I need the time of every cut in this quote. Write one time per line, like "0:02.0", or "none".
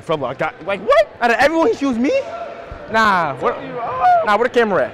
0:01.1